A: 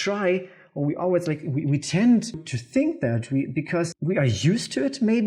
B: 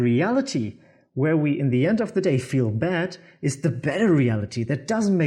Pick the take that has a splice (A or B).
A